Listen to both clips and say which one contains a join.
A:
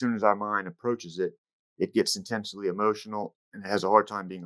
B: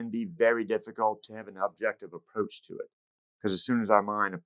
B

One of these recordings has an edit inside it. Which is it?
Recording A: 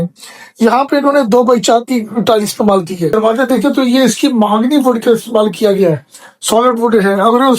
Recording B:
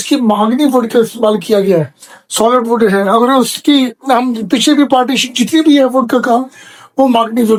A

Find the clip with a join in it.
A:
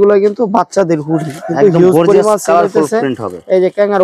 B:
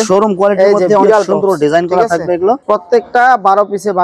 B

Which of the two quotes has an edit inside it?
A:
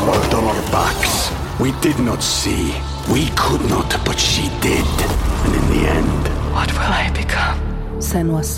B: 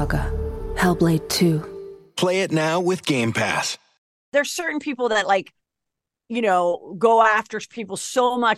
B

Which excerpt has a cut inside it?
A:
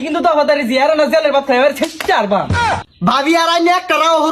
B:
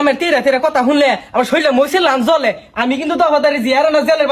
A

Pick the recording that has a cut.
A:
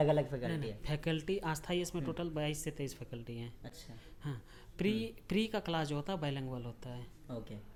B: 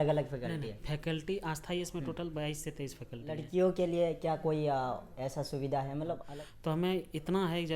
B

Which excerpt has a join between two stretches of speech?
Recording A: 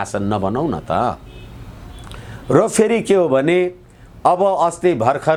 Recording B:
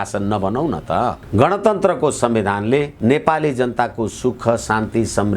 B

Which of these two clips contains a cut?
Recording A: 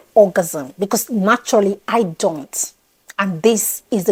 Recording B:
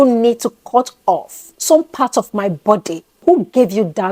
B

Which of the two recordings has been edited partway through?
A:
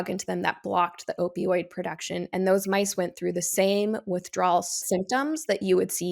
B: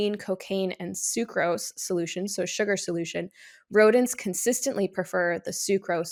A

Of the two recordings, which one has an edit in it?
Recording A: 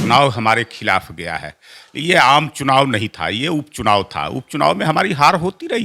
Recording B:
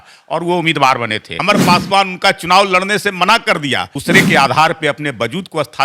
B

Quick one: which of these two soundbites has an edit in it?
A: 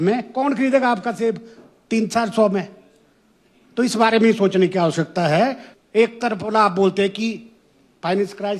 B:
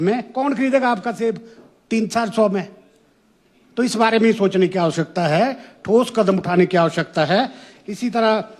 A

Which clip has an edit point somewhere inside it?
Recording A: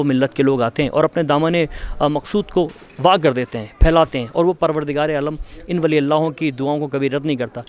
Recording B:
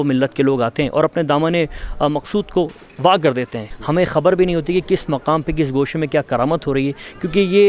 B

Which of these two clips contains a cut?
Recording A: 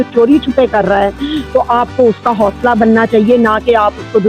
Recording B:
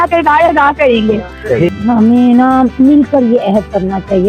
B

